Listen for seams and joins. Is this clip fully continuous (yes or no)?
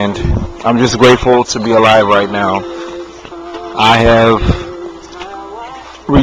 yes